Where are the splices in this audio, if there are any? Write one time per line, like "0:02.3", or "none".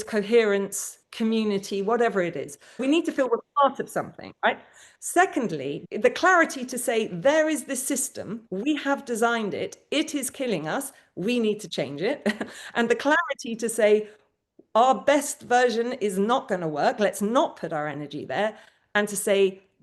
0:02.8
0:05.8